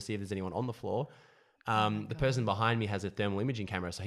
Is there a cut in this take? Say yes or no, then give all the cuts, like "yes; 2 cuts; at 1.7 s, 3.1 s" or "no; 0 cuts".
no; 0 cuts